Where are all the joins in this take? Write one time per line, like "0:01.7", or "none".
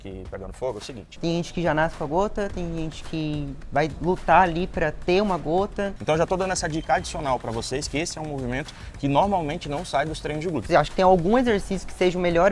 0:01.0
0:06.0
0:10.6